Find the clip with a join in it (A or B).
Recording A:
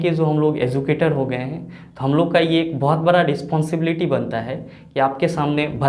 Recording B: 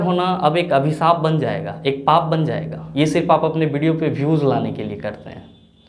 B